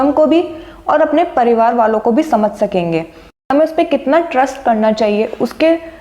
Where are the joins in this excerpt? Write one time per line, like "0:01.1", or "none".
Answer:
0:03.3